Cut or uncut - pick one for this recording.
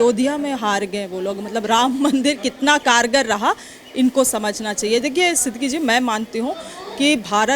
uncut